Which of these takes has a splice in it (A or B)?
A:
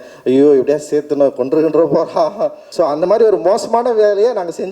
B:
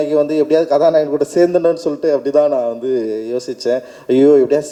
A